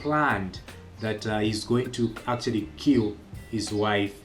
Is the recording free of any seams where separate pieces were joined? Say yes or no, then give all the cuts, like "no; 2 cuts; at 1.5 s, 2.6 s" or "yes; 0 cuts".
yes; 0 cuts